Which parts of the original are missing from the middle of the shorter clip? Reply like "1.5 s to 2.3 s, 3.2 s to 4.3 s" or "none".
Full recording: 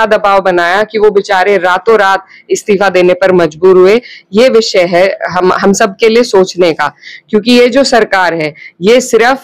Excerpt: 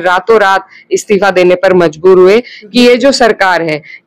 4.3 s to 7.4 s